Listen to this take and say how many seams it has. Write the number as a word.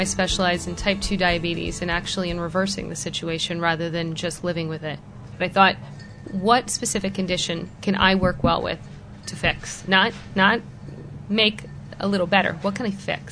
two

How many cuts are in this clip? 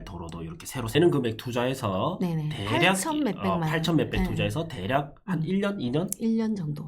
one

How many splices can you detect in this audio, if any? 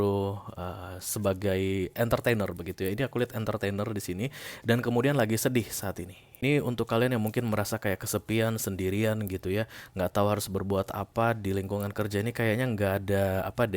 one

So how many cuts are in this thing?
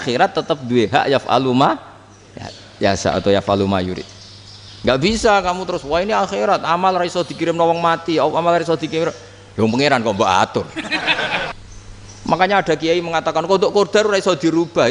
one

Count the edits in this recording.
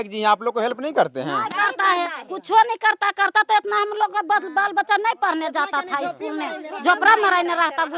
zero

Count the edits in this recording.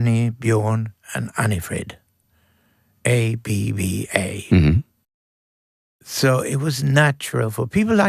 zero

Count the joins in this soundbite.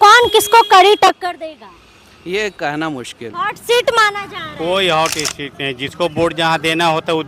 one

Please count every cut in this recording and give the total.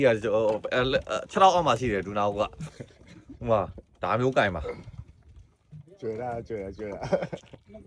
zero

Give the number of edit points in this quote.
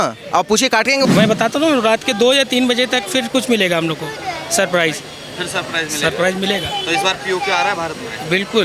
one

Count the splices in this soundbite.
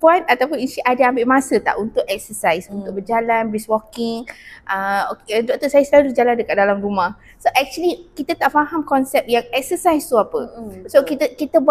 zero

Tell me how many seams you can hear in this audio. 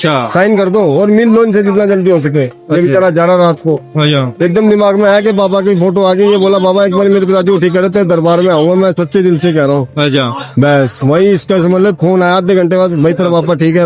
zero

